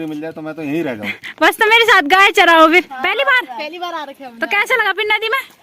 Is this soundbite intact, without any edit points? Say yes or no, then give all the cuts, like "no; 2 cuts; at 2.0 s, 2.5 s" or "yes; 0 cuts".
no; 1 cut; at 3.0 s